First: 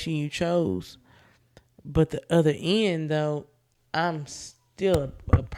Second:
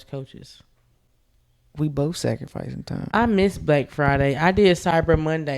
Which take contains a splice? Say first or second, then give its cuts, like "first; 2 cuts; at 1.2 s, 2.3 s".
second; 1 cut; at 3.1 s